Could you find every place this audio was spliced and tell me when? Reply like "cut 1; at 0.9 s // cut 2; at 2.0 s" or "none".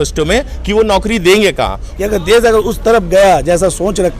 cut 1; at 1.8 s